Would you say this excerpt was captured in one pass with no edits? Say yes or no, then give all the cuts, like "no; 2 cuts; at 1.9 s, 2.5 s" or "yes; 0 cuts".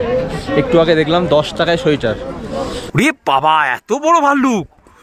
no; 1 cut; at 2.8 s